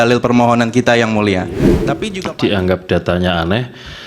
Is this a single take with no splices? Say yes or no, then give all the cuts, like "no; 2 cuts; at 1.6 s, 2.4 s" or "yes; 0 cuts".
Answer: no; 1 cut; at 1.8 s